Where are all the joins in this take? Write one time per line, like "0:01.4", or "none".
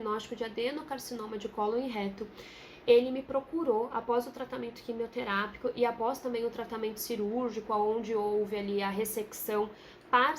none